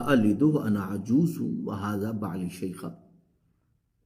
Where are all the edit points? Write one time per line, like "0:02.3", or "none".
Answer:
none